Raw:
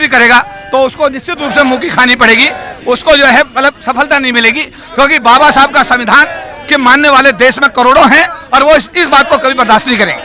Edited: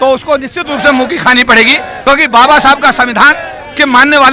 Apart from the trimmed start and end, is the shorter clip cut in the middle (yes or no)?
yes